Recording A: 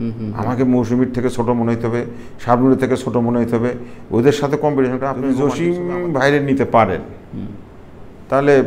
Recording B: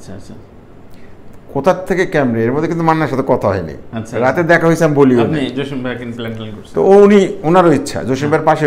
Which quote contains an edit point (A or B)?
A